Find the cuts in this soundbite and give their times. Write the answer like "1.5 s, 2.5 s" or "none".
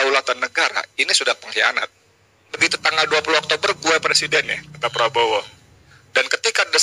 2.5 s